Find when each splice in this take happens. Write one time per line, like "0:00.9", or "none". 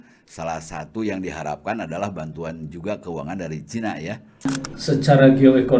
0:04.7